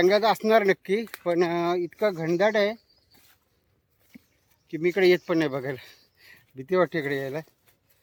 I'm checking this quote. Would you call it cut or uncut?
uncut